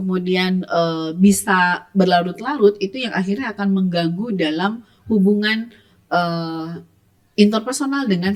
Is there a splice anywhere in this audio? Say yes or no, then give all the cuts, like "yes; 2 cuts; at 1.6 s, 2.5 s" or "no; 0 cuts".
no; 0 cuts